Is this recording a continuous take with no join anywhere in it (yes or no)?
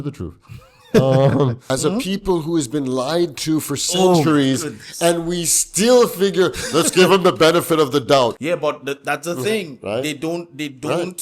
no